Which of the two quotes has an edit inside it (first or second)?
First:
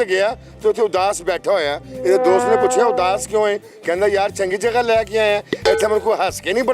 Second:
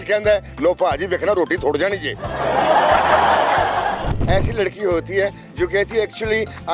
second